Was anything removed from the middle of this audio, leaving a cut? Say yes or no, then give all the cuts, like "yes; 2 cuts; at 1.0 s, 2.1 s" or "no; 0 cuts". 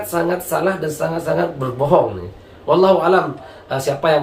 no; 0 cuts